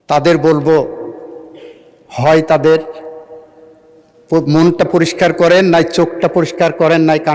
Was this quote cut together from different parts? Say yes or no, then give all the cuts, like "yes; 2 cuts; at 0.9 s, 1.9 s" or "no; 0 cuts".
no; 0 cuts